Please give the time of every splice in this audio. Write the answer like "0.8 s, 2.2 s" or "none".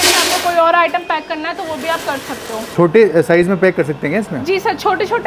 2.7 s

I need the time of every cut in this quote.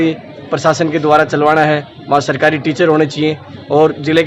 none

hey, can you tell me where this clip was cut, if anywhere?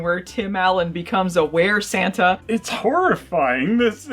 2.4 s

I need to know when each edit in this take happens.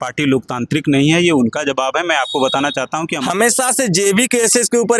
3.1 s

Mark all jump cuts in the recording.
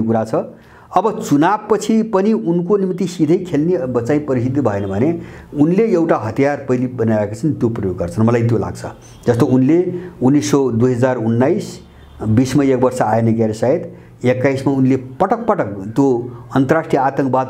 none

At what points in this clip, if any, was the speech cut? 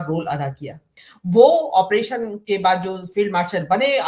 1.0 s

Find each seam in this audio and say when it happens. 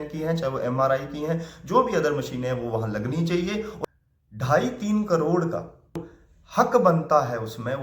3.8 s, 6.0 s

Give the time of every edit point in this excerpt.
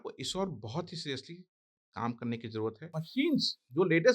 2.9 s

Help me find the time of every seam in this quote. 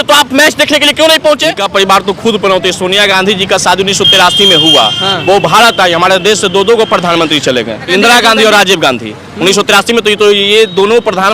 1.6 s, 7.9 s

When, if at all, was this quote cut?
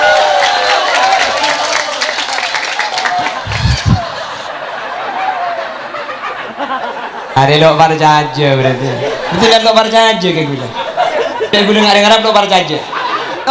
none

